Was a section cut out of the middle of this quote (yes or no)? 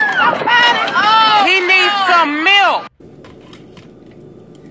yes